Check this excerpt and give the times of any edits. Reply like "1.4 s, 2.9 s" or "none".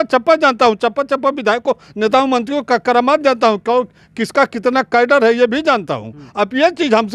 none